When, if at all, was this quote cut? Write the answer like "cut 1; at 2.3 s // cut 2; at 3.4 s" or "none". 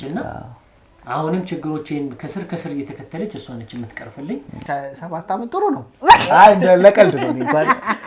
cut 1; at 4.5 s